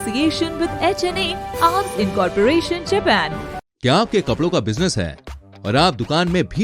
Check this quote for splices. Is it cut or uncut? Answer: cut